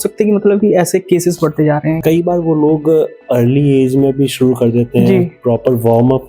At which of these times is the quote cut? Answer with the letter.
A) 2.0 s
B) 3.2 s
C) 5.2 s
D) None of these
A